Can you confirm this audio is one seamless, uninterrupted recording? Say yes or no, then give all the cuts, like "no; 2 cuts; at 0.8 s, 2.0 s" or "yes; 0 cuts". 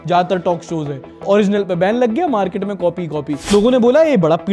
no; 1 cut; at 3.5 s